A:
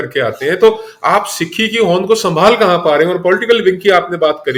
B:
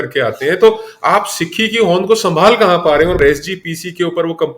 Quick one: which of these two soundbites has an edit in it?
B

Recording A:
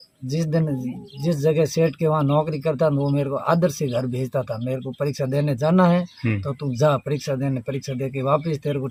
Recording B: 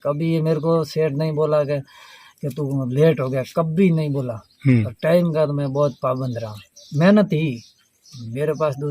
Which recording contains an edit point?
B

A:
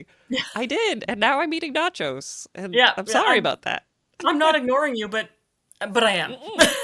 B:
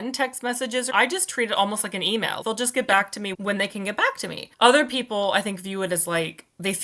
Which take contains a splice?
B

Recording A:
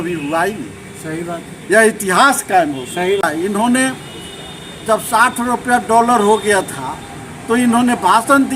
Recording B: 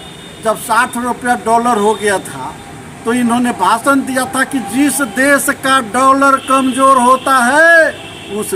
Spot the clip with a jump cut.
A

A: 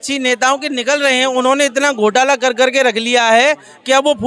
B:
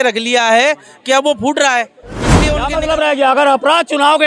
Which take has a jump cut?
B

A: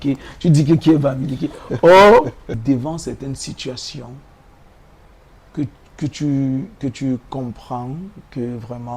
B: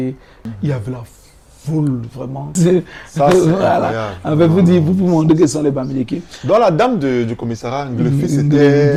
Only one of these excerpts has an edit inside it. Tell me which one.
A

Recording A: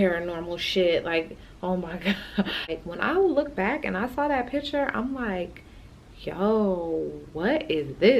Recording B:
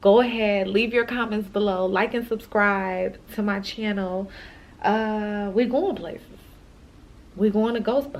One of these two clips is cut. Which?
A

